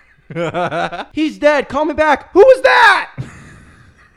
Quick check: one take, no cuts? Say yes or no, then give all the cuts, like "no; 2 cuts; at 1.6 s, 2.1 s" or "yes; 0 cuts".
no; 1 cut; at 1.0 s